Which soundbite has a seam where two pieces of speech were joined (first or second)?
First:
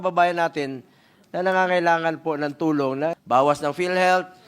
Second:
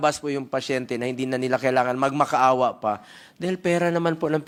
first